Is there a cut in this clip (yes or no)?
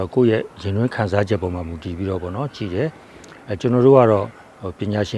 no